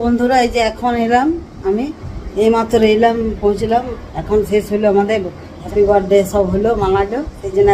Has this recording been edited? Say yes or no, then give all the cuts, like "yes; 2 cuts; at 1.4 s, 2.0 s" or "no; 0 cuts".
yes; 1 cut; at 5.6 s